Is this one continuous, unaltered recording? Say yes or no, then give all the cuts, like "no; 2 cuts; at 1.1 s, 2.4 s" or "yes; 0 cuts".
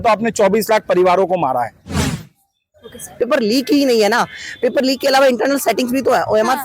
no; 1 cut; at 3.1 s